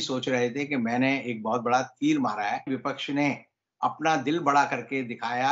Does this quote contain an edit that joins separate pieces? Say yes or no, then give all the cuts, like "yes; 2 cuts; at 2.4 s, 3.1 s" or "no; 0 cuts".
yes; 1 cut; at 2.7 s